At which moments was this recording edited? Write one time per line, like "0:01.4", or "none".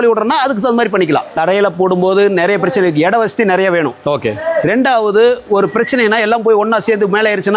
0:01.3

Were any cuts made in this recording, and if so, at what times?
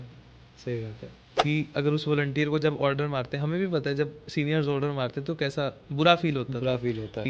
0:01.3

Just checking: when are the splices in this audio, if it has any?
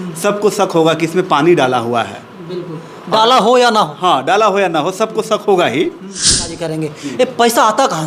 0:06.5

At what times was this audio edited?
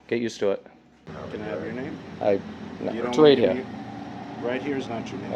0:01.1

